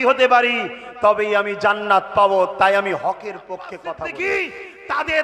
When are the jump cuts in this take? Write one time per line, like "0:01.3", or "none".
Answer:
0:03.8